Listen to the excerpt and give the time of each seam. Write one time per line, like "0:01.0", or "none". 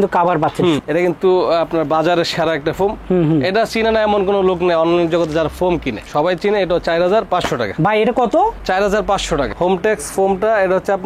0:00.8
0:09.5